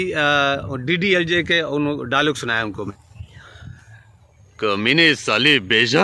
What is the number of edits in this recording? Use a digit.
1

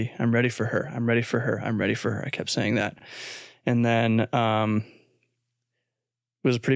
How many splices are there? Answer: 0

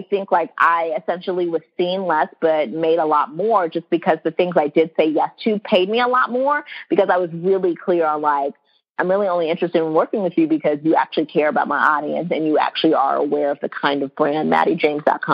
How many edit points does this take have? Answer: 0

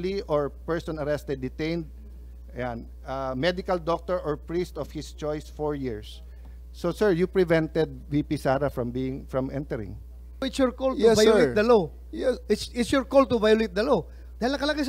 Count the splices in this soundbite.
1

